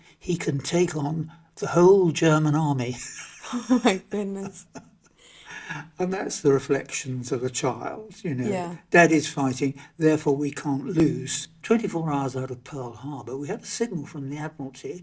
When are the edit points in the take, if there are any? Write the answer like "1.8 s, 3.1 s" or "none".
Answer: 11.0 s